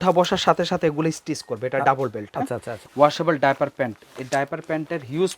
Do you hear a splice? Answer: yes; 1 cut; at 2.8 s

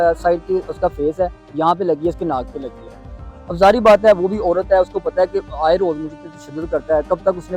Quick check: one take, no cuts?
yes; 0 cuts

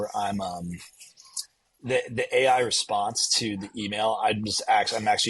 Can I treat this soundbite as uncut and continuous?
yes; 0 cuts

